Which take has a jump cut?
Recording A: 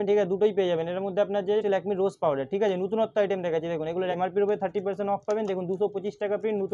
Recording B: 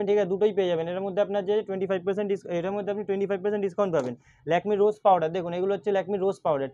A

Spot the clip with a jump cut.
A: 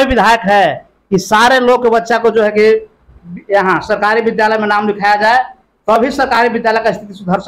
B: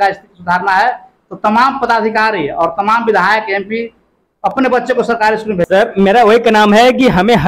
B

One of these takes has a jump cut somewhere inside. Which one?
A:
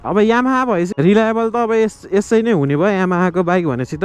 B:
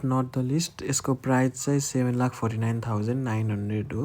A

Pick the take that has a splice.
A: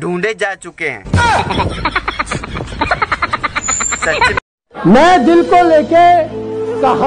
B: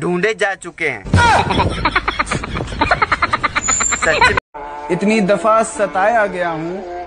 A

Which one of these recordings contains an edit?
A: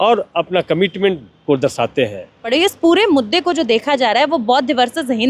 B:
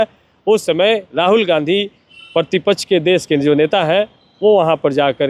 A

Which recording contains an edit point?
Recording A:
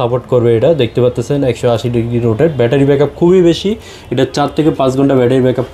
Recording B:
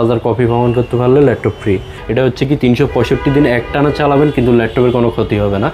B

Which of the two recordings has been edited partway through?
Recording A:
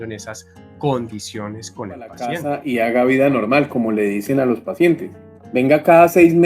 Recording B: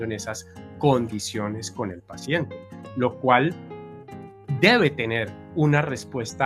A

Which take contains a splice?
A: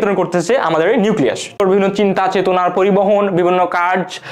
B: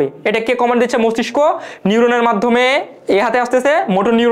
A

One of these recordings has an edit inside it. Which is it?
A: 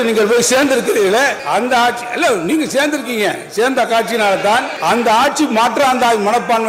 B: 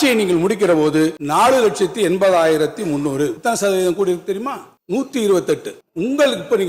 B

